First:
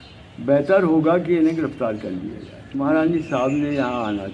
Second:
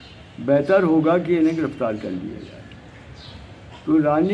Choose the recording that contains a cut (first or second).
first